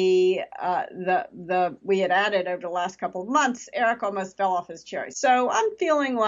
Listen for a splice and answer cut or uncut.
cut